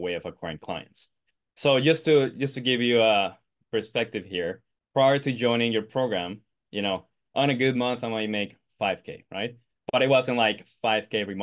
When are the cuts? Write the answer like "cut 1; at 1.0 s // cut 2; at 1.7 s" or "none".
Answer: none